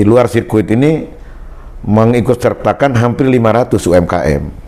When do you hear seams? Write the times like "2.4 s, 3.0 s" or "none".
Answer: none